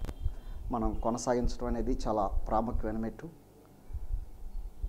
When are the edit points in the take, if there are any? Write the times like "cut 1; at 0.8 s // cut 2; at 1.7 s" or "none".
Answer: cut 1; at 2.3 s